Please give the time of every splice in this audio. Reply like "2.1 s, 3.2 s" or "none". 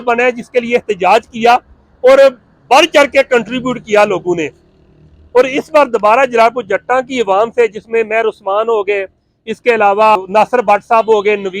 10.2 s